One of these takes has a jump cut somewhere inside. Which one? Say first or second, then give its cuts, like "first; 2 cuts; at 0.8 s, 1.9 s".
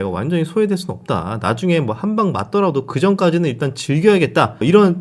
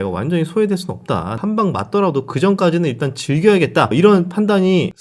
second; 2 cuts; at 1.4 s, 3.9 s